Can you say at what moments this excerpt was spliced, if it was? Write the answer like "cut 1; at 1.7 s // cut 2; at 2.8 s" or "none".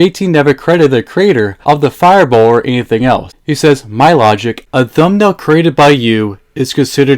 cut 1; at 3.4 s

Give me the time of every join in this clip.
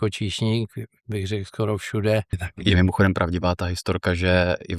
cut 1; at 2.3 s

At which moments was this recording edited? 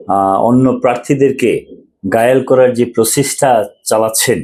none

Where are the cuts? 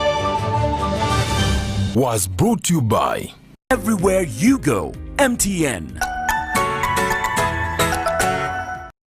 none

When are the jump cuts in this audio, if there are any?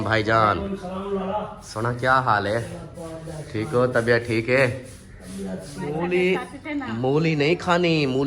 cut 1; at 5.8 s

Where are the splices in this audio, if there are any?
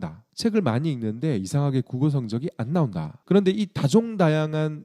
cut 1; at 3.1 s

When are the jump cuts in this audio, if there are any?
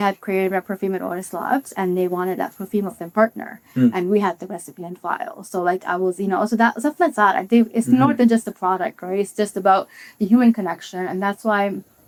none

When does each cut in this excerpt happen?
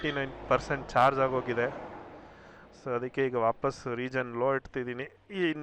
none

